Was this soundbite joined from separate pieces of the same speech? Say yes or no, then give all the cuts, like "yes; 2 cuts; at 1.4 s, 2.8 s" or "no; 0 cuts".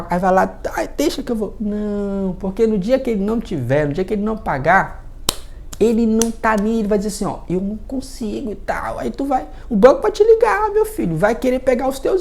no; 0 cuts